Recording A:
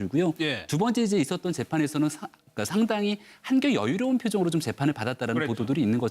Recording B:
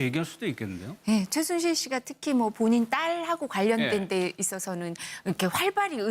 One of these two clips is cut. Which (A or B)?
A